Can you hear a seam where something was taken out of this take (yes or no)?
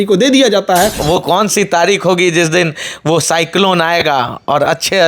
yes